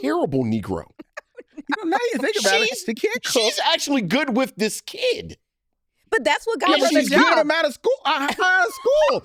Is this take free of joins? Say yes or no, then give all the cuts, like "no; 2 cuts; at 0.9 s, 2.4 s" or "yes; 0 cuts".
yes; 0 cuts